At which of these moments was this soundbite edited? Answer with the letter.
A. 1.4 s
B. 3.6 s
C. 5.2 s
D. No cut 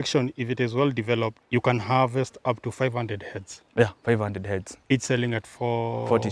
A